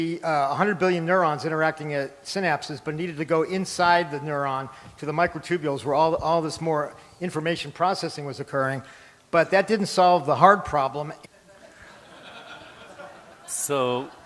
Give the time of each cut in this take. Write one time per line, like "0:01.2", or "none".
none